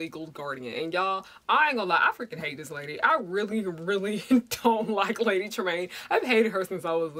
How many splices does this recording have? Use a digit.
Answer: 0